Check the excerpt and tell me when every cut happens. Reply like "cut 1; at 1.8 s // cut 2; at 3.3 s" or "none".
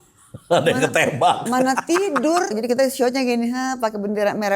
cut 1; at 2.5 s